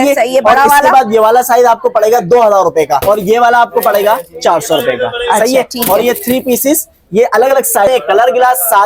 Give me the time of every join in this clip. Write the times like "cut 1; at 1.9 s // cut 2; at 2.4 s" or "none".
cut 1; at 3.0 s // cut 2; at 7.9 s